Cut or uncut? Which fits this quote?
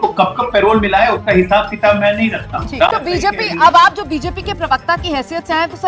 cut